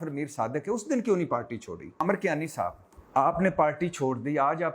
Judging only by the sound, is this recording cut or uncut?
cut